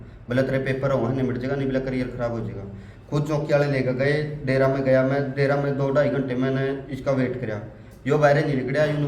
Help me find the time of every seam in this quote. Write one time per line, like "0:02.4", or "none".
none